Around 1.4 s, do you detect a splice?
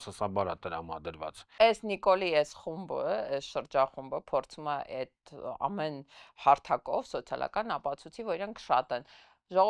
yes; 1 cut; at 1.4 s

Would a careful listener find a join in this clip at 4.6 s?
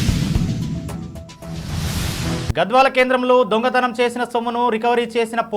no; 1 cut; at 2.5 s

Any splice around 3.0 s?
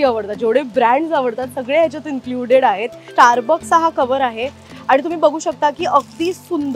yes; 1 cut; at 3.0 s

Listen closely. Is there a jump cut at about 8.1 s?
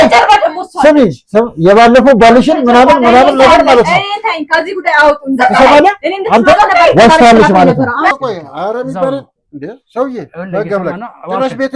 yes; 2 cuts; at 4.3 s, 8.1 s

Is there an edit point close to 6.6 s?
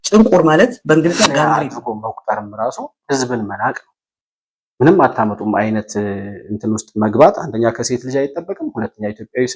no; 1 cut; at 1.5 s

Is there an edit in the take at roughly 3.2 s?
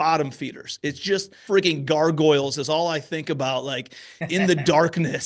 no; 1 cut; at 1.4 s

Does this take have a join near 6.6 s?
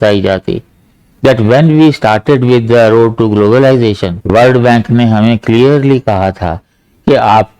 no; 1 cut; at 4.1 s

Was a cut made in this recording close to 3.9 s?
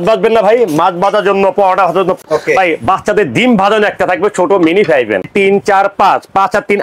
no; 2 cuts; at 2.2 s, 5.3 s

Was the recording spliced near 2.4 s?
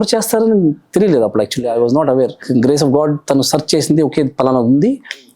yes; 1 cut; at 2.4 s

